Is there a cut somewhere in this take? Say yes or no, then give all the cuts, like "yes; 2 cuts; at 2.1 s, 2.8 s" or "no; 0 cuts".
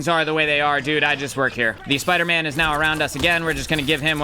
yes; 1 cut; at 1.8 s